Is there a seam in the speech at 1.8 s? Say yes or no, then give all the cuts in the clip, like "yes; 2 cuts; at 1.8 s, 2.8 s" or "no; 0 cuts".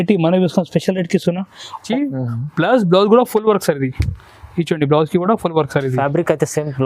yes; 1 cut; at 1.8 s